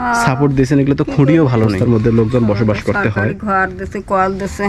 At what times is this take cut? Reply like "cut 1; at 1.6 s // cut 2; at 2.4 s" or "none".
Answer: cut 1; at 1.8 s